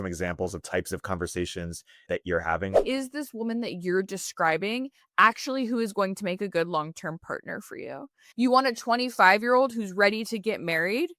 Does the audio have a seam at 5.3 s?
no; 2 cuts; at 2.8 s, 8.1 s

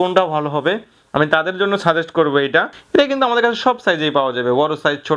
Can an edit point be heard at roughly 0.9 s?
no; 1 cut; at 2.8 s

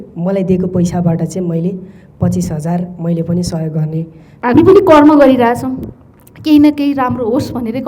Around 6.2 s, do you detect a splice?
no; 1 cut; at 4.2 s

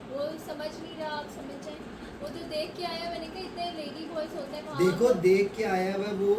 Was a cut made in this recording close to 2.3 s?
no; 0 cuts

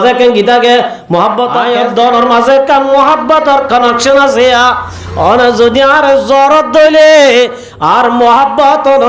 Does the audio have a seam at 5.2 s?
no; 1 cut; at 1.6 s

